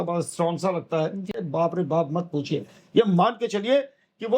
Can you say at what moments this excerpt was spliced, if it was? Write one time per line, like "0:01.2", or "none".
0:01.4